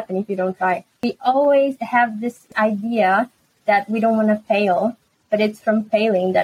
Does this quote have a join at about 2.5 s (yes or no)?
yes